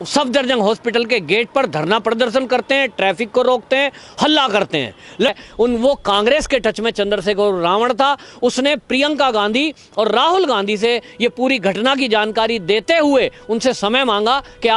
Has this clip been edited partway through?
yes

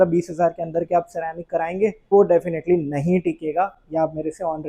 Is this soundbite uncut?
no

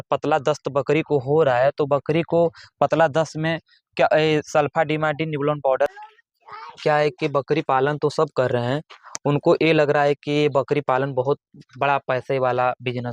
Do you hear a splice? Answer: yes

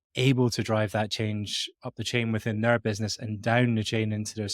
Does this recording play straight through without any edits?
no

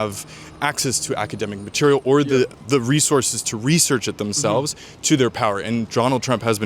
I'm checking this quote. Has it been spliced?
no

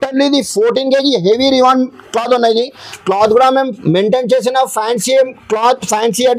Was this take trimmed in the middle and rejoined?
no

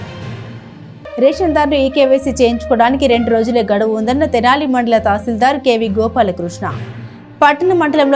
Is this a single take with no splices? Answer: yes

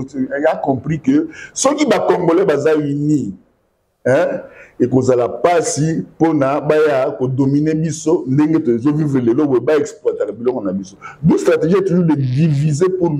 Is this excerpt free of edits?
yes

